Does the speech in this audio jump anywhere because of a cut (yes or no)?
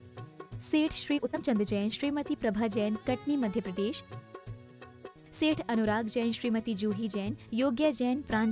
yes